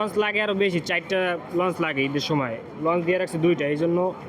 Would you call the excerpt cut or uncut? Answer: uncut